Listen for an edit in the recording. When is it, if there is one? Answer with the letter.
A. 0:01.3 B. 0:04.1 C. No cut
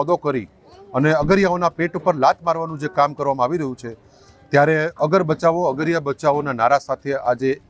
C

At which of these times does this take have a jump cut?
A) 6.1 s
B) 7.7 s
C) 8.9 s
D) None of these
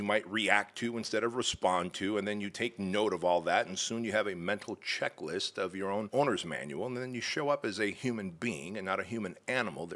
A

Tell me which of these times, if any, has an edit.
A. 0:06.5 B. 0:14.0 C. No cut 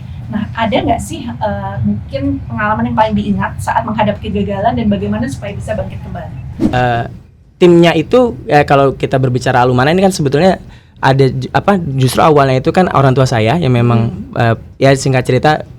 A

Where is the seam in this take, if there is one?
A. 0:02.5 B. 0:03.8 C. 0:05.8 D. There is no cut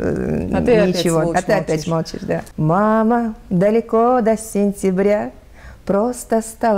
A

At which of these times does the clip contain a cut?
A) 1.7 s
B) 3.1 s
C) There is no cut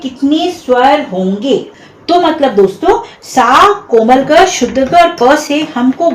A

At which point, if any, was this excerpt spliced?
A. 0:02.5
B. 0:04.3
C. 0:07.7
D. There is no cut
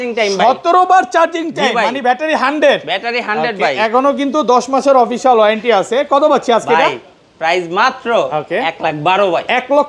D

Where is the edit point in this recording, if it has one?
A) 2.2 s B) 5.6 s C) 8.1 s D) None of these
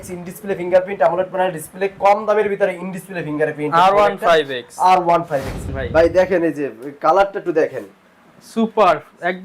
B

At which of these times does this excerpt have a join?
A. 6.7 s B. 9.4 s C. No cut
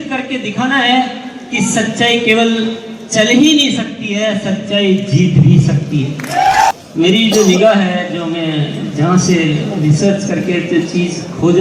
A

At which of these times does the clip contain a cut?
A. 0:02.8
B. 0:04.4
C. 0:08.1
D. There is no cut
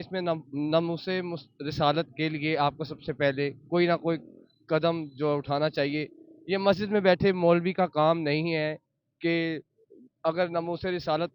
D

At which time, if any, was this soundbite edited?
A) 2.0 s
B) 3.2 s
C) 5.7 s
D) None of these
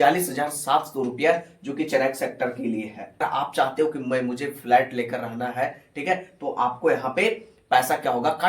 B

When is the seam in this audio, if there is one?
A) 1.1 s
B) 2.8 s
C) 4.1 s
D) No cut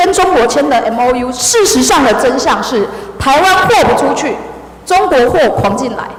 D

